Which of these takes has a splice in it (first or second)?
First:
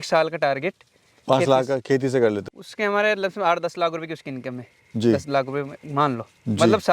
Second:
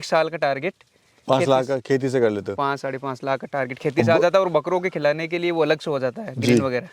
first